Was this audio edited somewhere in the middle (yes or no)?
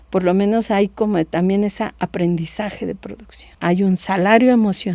yes